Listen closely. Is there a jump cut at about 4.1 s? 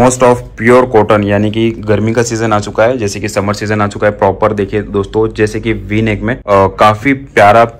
no; 1 cut; at 6.4 s

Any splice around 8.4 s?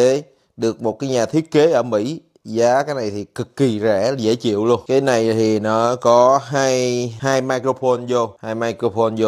yes; 3 cuts; at 4.8 s, 7.1 s, 8.4 s

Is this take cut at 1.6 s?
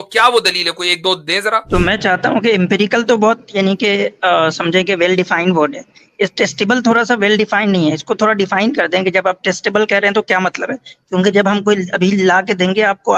yes; 1 cut; at 1.6 s

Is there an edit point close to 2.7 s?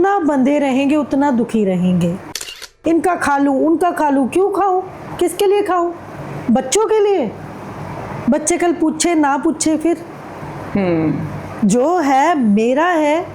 yes; 1 cut; at 2.7 s

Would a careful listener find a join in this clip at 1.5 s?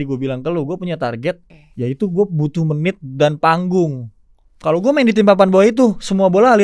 yes; 1 cut; at 1.5 s

